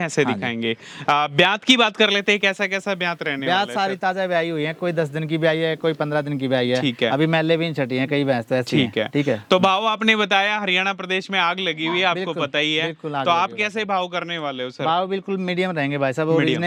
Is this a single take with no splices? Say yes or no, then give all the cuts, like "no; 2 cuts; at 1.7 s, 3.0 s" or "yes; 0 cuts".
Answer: yes; 0 cuts